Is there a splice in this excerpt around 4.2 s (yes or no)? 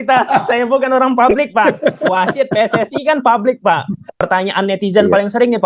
yes